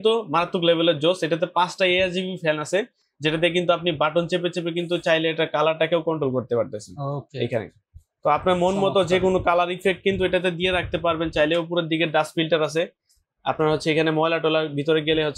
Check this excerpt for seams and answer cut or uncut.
uncut